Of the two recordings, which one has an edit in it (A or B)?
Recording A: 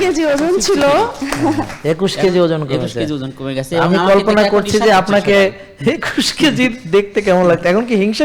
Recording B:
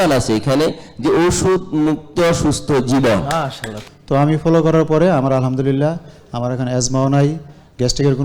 B